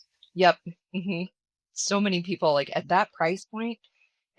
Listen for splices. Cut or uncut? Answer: uncut